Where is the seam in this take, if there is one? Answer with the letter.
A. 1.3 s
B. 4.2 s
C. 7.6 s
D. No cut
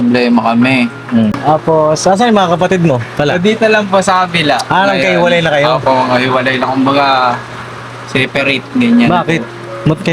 A